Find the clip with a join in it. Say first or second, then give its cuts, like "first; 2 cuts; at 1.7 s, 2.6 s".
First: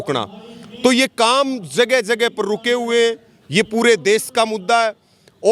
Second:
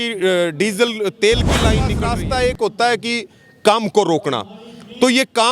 second; 1 cut; at 1.9 s